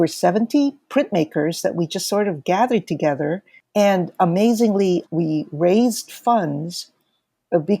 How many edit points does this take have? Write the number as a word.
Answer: one